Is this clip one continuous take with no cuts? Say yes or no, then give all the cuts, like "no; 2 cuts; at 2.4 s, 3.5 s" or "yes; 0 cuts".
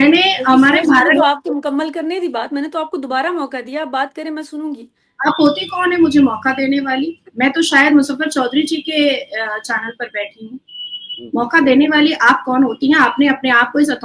yes; 0 cuts